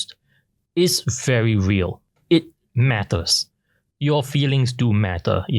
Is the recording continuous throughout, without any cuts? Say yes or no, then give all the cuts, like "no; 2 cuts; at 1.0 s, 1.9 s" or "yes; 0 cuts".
no; 1 cut; at 2.1 s